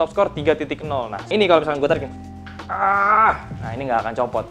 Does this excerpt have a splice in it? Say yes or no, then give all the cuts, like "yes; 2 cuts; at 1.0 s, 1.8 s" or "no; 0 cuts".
yes; 1 cut; at 1.2 s